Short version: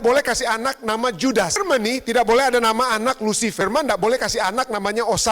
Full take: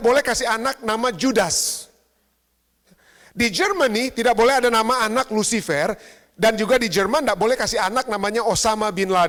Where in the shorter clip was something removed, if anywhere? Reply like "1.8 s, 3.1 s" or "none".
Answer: 1.6 s, 3.6 s